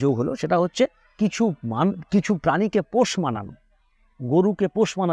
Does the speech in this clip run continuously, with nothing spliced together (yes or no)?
yes